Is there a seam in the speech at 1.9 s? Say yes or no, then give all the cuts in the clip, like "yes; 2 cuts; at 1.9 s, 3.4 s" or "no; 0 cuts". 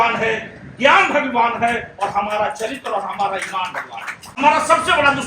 no; 1 cut; at 4.3 s